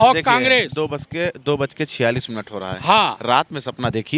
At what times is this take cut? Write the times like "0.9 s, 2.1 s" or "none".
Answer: none